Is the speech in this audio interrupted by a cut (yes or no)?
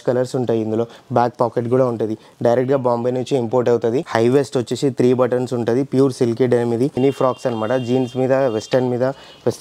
yes